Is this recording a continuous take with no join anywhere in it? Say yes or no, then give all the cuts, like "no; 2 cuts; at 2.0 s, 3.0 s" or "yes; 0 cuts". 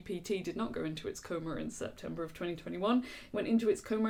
yes; 0 cuts